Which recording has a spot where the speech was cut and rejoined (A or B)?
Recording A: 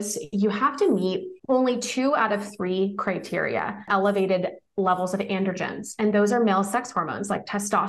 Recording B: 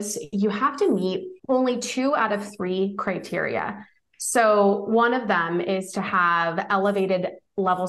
A